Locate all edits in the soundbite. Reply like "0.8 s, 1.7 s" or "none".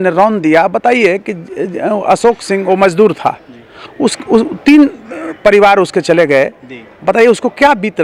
none

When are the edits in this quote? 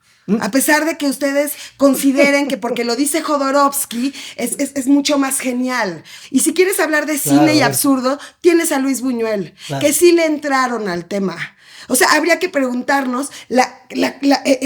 6.2 s

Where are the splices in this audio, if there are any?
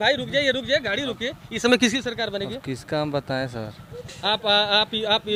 none

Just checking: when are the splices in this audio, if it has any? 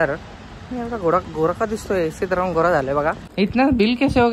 3.2 s

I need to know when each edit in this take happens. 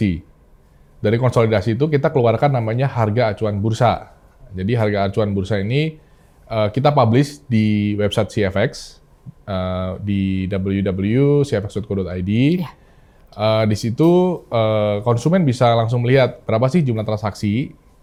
none

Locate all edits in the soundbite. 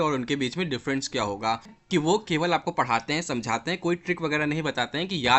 1.8 s

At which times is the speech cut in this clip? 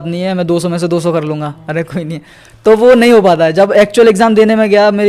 none

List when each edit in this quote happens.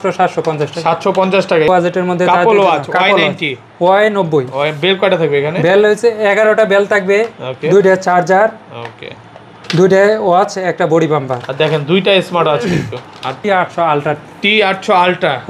1.7 s, 13.4 s

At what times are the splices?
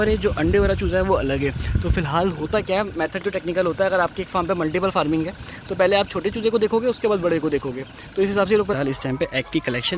8.7 s

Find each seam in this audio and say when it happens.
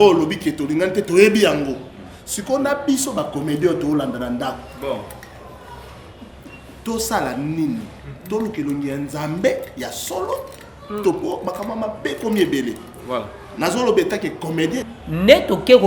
14.8 s

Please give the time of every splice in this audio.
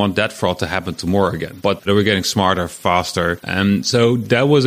1.7 s, 3.4 s

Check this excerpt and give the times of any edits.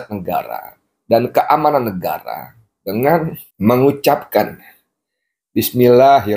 3.4 s

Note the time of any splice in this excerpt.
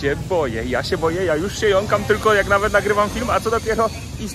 none

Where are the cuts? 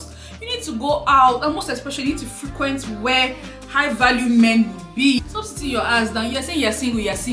5.4 s

